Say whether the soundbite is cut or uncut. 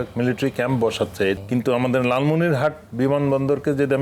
cut